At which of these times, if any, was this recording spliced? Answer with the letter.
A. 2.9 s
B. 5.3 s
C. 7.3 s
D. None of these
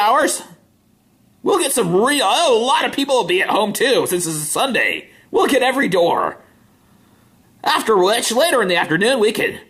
A